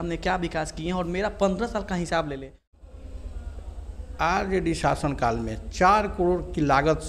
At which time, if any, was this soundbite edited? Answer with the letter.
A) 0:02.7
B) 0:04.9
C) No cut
A